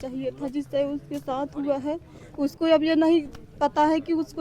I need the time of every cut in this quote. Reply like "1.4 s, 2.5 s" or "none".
none